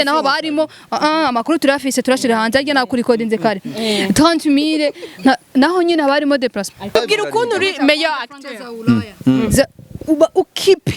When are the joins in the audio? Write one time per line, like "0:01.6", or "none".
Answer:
0:06.9